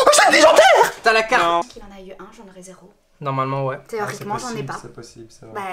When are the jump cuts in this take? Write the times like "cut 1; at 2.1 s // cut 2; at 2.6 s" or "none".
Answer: cut 1; at 1.7 s